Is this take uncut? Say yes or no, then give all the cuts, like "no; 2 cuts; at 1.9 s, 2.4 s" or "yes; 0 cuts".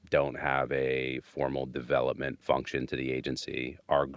no; 1 cut; at 2.4 s